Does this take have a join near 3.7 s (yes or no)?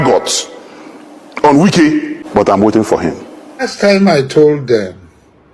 yes